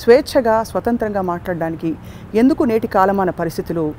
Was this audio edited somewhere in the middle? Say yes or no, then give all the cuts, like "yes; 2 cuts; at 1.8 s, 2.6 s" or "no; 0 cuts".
no; 0 cuts